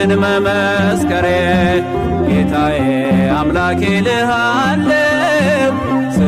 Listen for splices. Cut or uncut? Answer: uncut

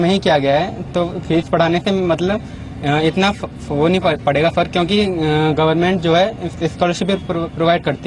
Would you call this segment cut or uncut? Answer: uncut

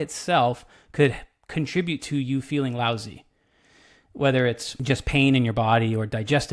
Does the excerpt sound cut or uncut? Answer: cut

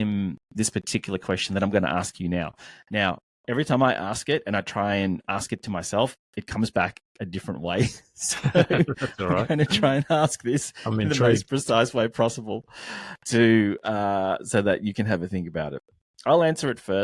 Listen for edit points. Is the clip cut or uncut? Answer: uncut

